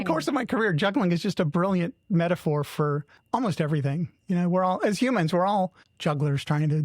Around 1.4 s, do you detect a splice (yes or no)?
no